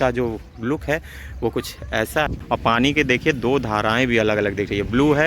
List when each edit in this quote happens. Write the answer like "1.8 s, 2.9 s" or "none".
2.4 s